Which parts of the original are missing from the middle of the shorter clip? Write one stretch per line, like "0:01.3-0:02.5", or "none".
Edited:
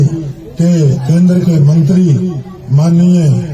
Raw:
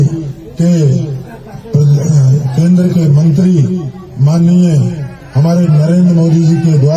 0:01.0-0:02.5